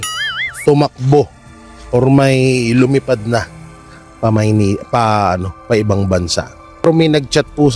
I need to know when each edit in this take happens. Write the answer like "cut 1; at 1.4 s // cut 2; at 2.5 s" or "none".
cut 1; at 6.8 s